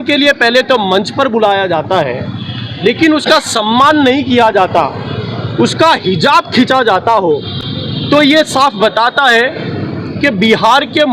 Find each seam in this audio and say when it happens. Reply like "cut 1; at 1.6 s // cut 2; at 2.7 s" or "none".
none